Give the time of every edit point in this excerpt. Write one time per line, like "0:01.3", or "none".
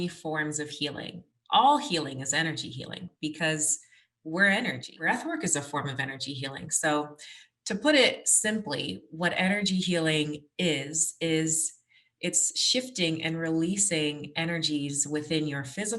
0:05.0